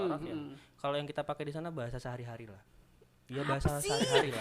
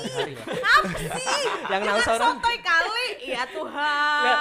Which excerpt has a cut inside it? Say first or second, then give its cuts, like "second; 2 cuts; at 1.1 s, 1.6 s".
first; 1 cut; at 2.6 s